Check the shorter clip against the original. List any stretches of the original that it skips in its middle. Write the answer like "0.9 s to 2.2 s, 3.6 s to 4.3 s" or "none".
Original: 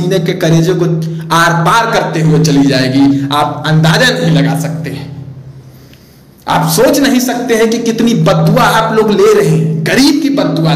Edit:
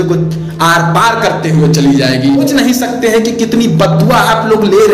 3.2 s to 6.9 s